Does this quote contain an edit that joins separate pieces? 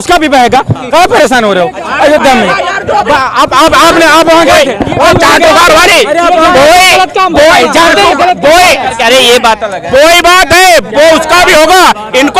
no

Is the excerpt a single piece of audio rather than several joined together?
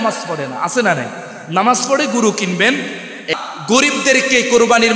no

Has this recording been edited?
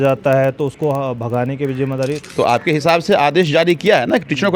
yes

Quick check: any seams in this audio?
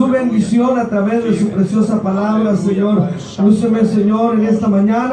yes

